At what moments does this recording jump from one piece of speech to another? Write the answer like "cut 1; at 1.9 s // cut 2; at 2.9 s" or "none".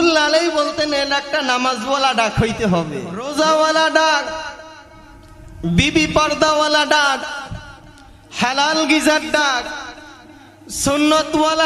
cut 1; at 3.3 s